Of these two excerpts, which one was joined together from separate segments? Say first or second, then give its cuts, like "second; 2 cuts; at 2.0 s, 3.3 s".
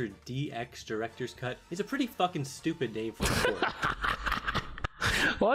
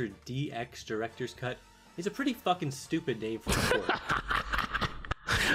first; 1 cut; at 1.6 s